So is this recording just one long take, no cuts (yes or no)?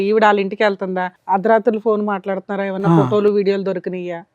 no